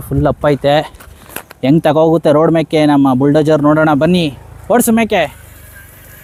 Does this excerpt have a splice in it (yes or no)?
no